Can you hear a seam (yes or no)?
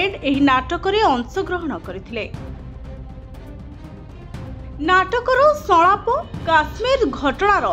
yes